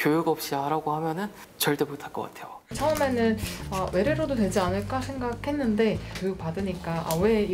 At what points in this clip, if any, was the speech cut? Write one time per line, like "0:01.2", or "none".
0:01.4
0:02.8